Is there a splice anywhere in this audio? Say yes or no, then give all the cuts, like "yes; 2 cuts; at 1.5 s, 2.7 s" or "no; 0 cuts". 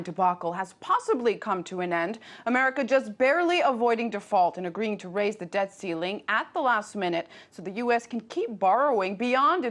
no; 0 cuts